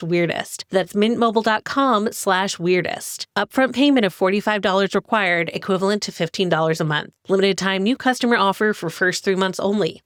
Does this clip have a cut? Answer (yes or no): no